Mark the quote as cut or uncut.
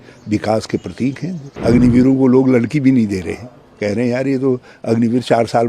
cut